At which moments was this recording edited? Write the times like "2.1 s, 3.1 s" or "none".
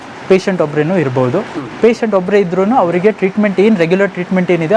none

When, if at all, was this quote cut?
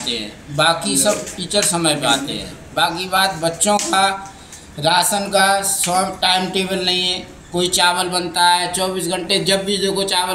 none

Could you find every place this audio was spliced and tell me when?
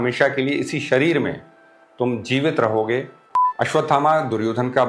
3.2 s

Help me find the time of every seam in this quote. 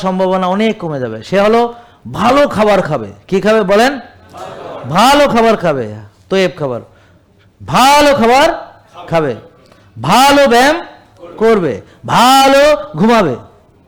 none

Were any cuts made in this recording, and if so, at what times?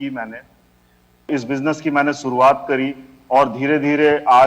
1.3 s

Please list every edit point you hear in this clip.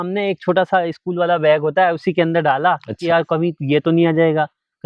3.0 s

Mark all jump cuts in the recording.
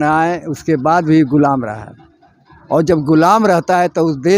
none

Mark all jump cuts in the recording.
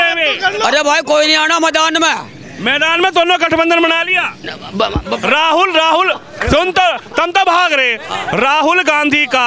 none

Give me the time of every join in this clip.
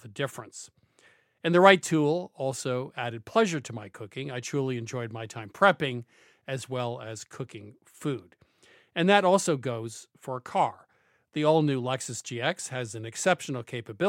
none

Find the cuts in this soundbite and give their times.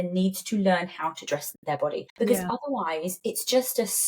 1.8 s

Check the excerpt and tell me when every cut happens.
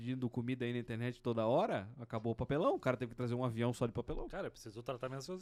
none

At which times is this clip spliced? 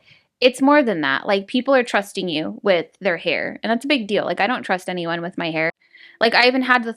5.8 s

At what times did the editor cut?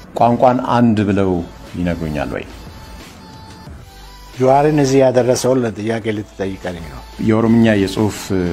7.1 s

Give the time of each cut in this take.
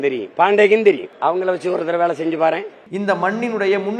1.1 s, 2.8 s

